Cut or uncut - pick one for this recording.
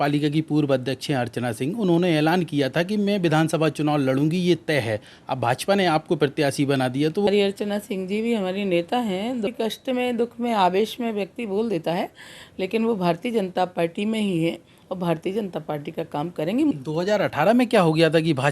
cut